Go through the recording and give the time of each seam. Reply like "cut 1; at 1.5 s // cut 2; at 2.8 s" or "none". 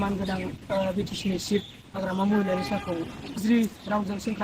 cut 1; at 3.4 s

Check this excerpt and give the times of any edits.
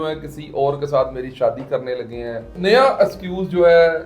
cut 1; at 2.5 s

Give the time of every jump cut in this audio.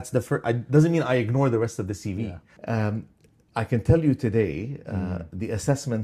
cut 1; at 2.5 s

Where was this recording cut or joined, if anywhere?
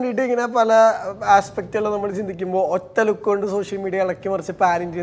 none

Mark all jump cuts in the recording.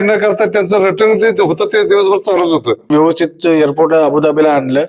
cut 1; at 2.9 s

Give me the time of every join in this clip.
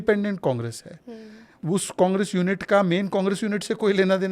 cut 1; at 1.6 s

